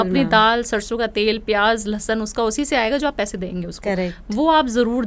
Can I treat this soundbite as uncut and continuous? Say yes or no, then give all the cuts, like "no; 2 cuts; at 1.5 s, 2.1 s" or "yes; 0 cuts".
yes; 0 cuts